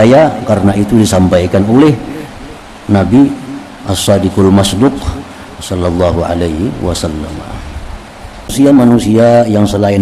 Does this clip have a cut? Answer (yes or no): yes